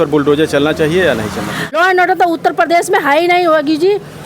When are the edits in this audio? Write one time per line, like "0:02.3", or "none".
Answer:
0:01.7